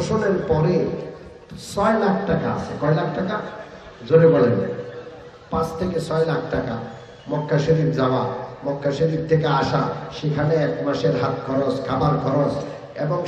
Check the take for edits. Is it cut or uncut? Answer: uncut